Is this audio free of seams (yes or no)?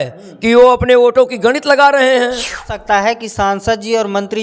no